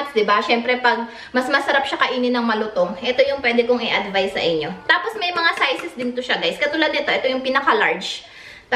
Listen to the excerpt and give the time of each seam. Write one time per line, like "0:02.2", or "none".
none

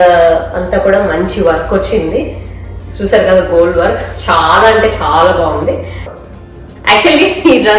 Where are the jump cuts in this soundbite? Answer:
0:06.1

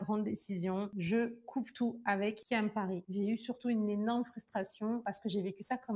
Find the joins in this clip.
0:03.0

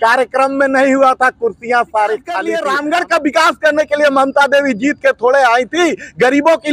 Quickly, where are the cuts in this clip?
0:02.5

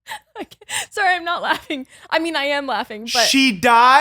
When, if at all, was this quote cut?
none

